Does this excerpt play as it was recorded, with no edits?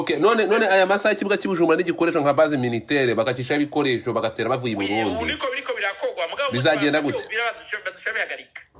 yes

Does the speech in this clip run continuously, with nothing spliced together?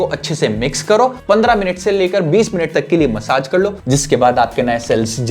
no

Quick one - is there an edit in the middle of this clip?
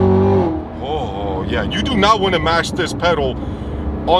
no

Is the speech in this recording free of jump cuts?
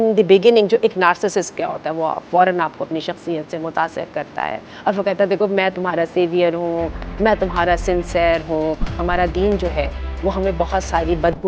no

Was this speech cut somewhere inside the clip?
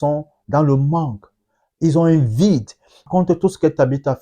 yes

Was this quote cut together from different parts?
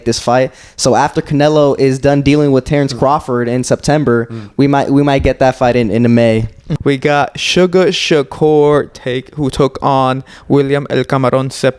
yes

